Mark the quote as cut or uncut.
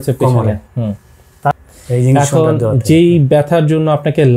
cut